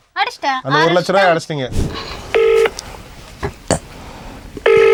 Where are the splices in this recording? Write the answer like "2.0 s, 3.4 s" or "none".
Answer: none